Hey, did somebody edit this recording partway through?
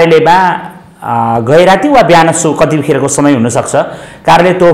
no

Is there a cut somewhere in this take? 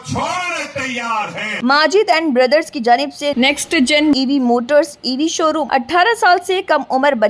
yes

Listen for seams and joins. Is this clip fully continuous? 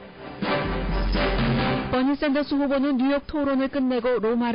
no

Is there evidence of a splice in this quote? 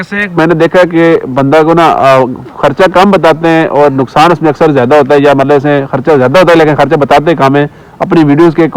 no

